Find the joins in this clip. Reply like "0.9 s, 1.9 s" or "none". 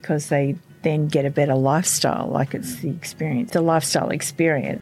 3.5 s